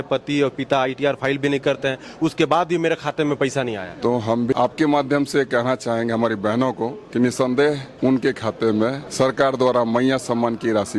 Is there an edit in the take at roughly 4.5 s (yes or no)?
yes